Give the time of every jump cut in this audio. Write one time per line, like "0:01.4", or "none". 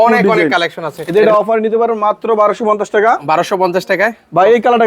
0:00.9